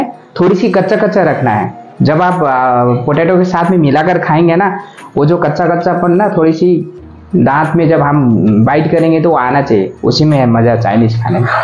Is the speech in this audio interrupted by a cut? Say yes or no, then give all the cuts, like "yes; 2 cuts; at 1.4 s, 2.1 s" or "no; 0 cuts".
no; 0 cuts